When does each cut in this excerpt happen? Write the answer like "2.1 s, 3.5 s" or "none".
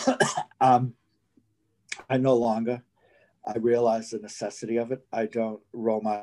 5.0 s

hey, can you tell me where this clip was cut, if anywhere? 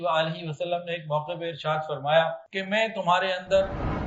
2.5 s

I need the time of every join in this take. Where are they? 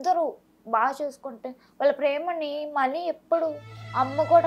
none

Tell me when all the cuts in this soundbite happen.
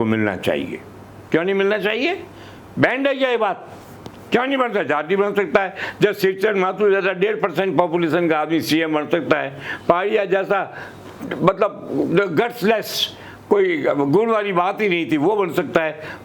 none

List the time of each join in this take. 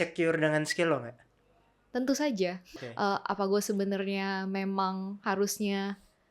2.7 s

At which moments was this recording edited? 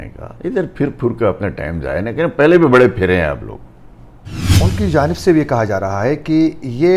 4.5 s

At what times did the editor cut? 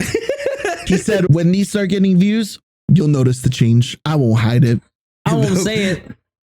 1.3 s

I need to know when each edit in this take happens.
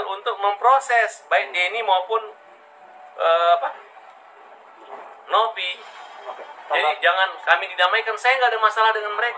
none

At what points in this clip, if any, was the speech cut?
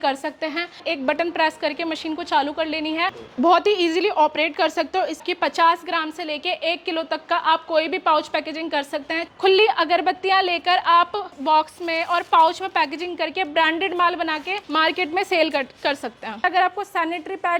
0.8 s, 5.2 s, 9.2 s, 11.4 s, 14.5 s, 16.4 s

